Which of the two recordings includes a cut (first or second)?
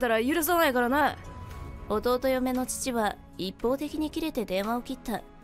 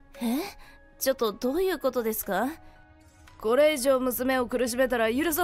second